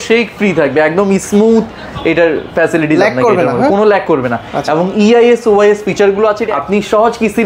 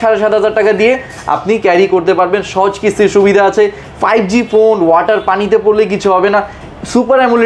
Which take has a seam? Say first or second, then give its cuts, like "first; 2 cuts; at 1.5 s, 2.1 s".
first; 1 cut; at 6.4 s